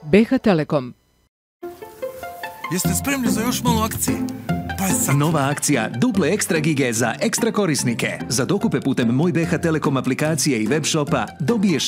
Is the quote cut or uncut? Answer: cut